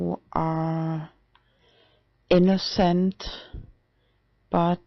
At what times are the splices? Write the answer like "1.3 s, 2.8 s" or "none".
none